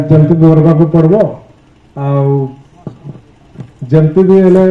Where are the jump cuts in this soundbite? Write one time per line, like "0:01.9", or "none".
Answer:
none